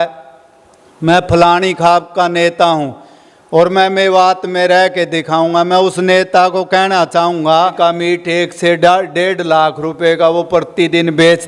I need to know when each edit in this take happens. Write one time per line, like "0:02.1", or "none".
0:07.7